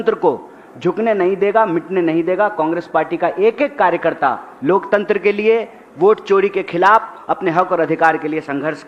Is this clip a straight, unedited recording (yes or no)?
yes